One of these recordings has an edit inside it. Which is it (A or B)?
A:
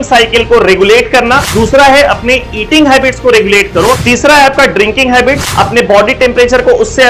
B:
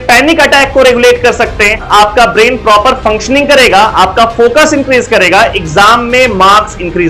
A